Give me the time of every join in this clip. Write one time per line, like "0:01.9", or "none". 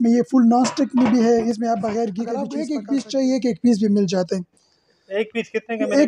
0:02.4